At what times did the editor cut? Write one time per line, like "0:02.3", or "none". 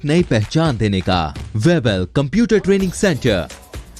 0:01.4

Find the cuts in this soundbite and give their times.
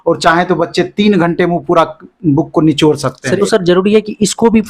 0:03.4

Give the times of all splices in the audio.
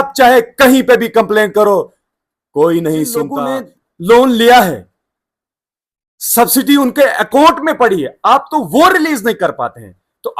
0:03.3

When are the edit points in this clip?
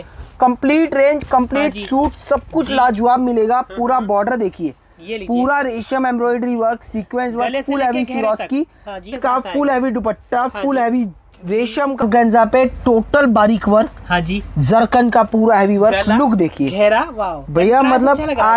0:09.1
0:12.0

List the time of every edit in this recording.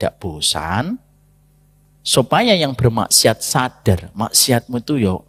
none

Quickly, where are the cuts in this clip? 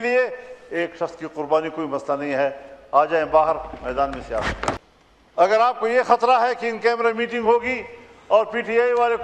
0:04.8

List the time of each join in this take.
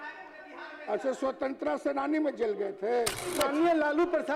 0:03.3

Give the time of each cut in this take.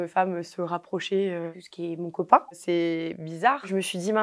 none

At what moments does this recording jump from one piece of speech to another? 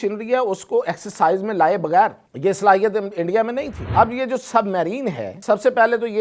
0:02.2
0:03.8
0:05.3

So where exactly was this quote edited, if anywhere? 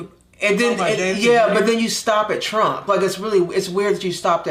none

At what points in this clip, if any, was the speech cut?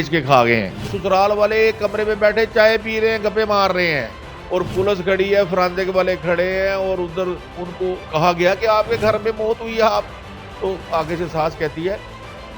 0:00.9
0:08.0

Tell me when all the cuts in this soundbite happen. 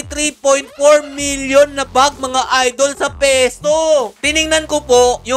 0:04.2

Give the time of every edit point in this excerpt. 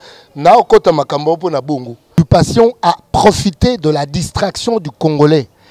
0:02.1

